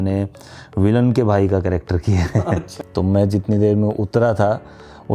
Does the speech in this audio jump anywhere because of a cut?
yes; 1 cut; at 2.8 s

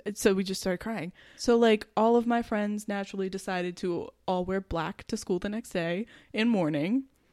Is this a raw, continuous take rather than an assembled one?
no; 1 cut; at 1.3 s

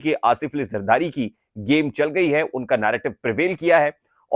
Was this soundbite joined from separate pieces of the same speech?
no; 0 cuts

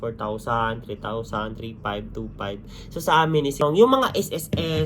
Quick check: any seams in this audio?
yes; 1 cut; at 3.6 s

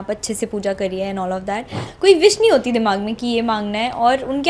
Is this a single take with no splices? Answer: no; 1 cut; at 1.8 s

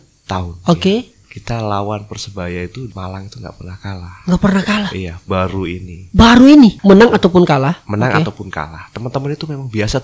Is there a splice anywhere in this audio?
yes; 2 cuts; at 2.9 s, 6.8 s

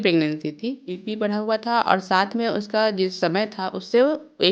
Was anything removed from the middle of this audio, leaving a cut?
yes; 1 cut; at 0.9 s

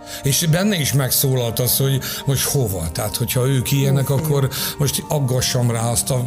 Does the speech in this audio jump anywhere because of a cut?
no; 0 cuts

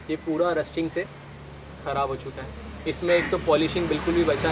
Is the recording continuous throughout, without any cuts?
yes; 0 cuts

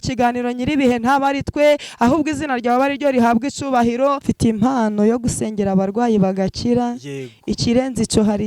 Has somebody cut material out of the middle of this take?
yes; 1 cut; at 4.2 s

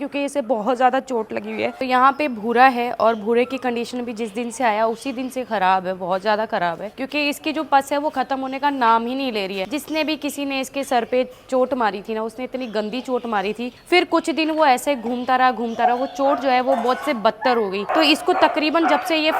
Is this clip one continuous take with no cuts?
yes; 0 cuts

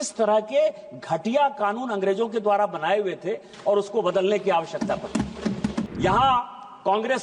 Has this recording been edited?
yes; 1 cut; at 5.9 s

